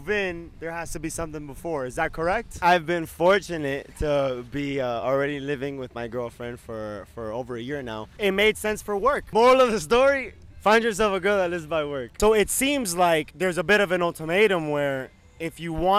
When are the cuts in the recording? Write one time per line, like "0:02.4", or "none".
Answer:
0:02.5
0:09.2
0:12.1